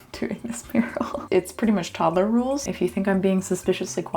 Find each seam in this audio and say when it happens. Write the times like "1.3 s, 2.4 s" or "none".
1.1 s, 2.7 s